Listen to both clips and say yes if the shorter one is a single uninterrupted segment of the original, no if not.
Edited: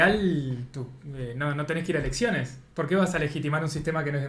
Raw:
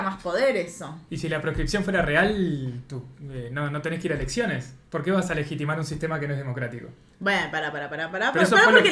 yes